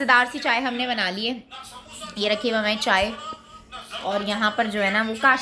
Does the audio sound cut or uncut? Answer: uncut